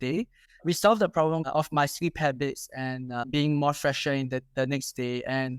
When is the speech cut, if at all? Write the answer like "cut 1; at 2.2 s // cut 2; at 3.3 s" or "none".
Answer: cut 1; at 1.4 s // cut 2; at 3.3 s